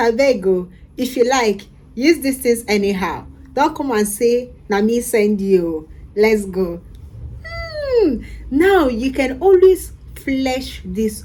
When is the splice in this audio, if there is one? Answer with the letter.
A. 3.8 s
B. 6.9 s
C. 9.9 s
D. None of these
D